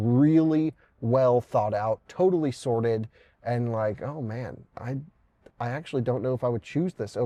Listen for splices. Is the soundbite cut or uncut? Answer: uncut